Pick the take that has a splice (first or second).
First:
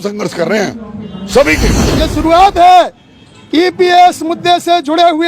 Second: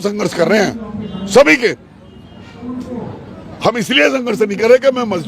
first